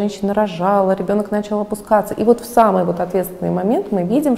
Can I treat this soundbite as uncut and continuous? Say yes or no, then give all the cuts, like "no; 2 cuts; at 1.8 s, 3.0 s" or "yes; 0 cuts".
yes; 0 cuts